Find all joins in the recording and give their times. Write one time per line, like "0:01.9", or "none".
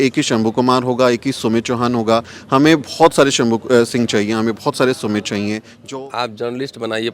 0:05.7